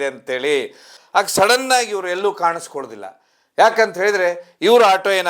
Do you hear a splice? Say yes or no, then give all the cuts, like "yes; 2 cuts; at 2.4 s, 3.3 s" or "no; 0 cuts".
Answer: yes; 1 cut; at 1.0 s